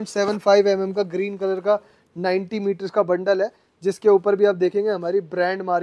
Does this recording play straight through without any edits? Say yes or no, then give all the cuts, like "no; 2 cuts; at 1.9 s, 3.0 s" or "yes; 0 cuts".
yes; 0 cuts